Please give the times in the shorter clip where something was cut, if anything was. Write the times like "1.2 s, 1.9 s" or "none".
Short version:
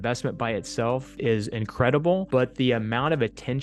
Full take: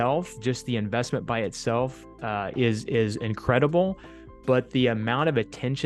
1.1 s, 2.2 s